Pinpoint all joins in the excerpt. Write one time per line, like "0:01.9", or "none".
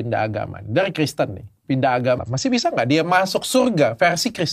0:02.2